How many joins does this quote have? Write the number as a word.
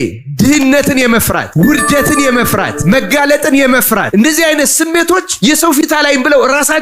four